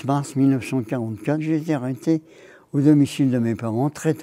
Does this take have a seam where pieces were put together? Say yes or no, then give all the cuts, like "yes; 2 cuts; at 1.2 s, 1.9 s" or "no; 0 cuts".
yes; 1 cut; at 1.4 s